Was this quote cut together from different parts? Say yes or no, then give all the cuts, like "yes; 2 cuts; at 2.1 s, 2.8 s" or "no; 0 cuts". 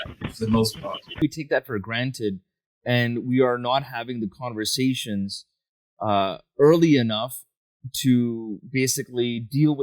yes; 1 cut; at 1.2 s